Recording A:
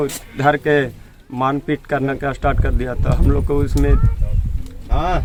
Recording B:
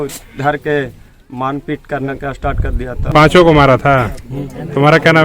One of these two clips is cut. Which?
B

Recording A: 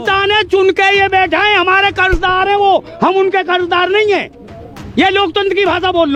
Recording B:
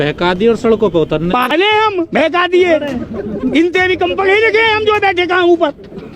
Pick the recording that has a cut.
B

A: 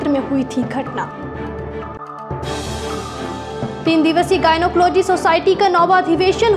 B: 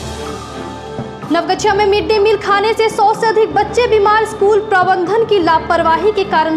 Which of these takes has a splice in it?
B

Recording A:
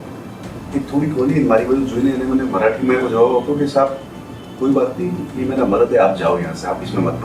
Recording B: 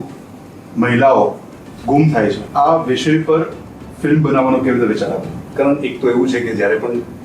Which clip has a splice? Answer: B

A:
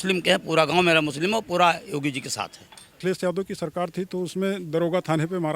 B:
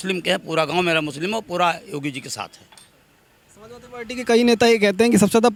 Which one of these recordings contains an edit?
A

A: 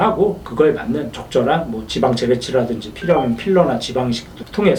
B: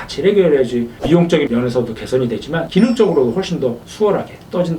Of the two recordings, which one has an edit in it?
B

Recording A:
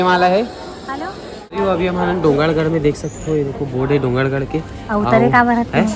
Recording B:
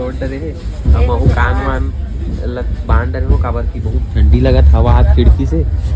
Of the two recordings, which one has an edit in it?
A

